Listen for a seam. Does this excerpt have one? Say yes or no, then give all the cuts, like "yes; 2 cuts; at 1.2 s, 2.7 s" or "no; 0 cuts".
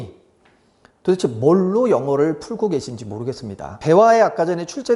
yes; 1 cut; at 3.8 s